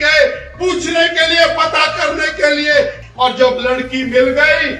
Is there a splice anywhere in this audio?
yes; 1 cut; at 3.0 s

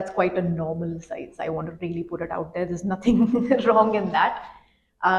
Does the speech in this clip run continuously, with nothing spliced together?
yes; 0 cuts

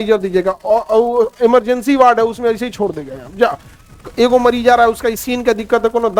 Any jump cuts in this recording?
no; 0 cuts

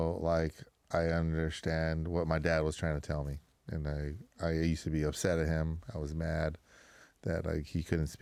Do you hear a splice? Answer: no; 0 cuts

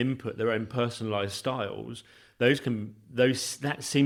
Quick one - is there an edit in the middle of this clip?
no; 0 cuts

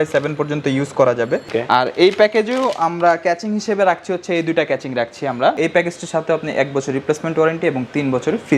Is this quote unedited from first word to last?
no; 2 cuts; at 1.5 s, 5.6 s

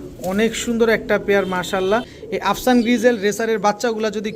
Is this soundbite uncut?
no; 1 cut; at 2.2 s

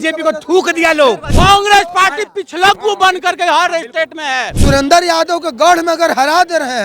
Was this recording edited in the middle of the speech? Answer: yes; 2 cuts; at 1.3 s, 4.5 s

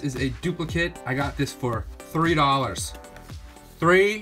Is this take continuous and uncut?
yes; 0 cuts

